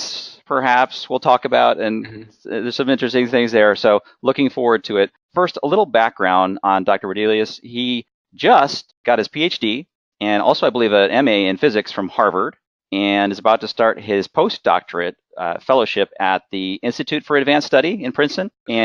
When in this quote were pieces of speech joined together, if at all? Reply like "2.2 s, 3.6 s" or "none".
1.2 s